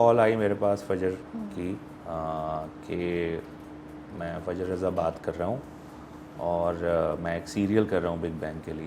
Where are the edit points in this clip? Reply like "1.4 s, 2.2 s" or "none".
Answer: none